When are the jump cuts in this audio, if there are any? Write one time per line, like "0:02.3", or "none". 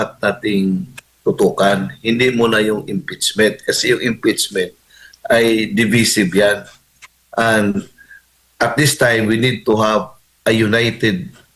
none